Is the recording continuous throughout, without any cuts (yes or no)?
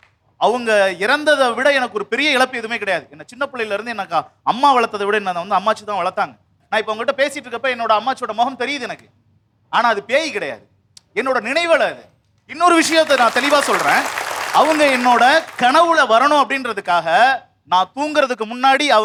yes